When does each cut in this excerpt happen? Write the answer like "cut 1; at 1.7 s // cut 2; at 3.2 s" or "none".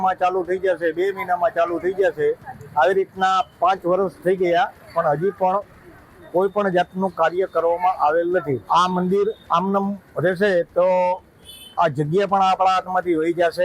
cut 1; at 8.6 s